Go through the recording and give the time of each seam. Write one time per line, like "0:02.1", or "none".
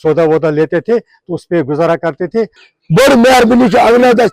0:02.6